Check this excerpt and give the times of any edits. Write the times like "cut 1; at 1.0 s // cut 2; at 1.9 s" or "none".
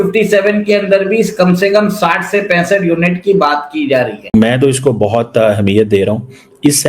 cut 1; at 4.3 s